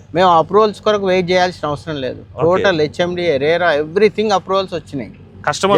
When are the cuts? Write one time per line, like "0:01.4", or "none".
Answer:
none